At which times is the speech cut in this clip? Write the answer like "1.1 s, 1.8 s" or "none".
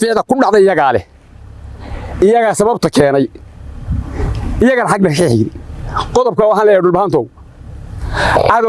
none